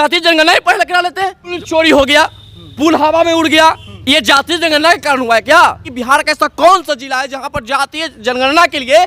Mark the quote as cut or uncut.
cut